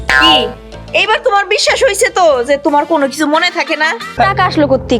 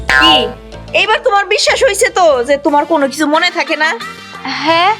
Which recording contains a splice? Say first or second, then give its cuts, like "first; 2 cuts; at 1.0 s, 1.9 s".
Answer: first; 1 cut; at 4.1 s